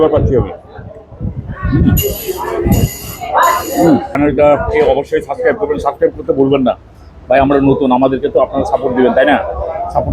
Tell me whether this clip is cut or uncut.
cut